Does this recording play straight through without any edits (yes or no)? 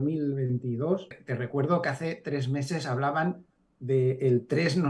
no